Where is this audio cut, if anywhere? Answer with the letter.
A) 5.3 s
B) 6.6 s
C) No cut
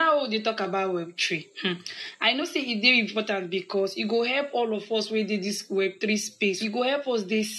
B